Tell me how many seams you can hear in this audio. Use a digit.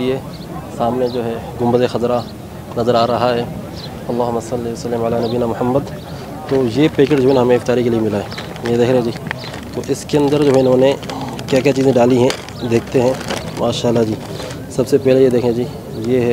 0